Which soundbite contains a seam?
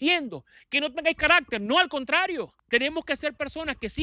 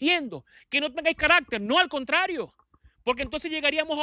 first; 1 cut; at 2.6 s

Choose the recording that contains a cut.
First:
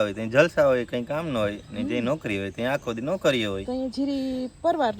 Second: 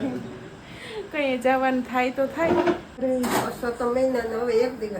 second; 1 cut; at 2.9 s

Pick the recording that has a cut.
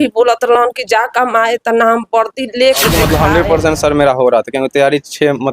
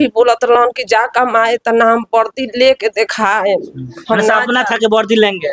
first; 1 cut; at 3.0 s

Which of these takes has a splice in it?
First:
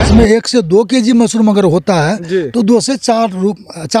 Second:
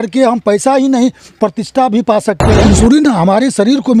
second; 1 cut; at 2.6 s

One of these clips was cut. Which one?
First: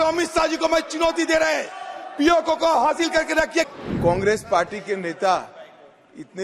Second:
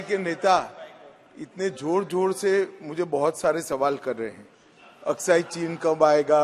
first; 1 cut; at 3.7 s

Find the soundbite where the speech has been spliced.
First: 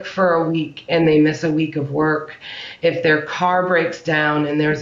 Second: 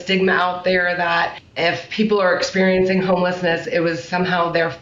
second; 2 cuts; at 1.4 s, 3.6 s

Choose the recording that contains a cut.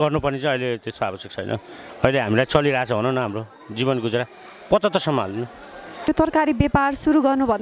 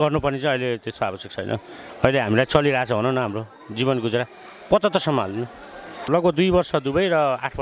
second; 1 cut; at 6.1 s

